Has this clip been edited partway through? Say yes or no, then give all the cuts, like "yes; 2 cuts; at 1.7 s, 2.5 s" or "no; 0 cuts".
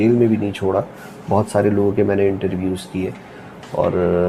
no; 0 cuts